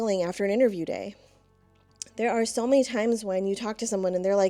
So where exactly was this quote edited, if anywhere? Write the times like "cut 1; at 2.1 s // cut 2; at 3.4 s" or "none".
none